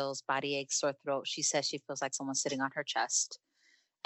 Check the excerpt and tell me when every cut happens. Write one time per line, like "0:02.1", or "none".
none